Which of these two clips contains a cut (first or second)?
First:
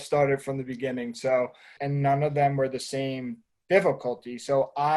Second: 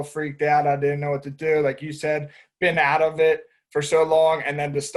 first